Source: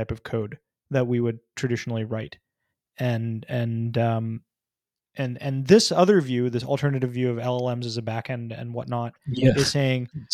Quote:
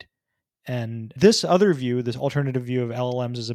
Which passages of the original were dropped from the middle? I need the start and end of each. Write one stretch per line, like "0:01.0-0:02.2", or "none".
0:03.5-0:05.6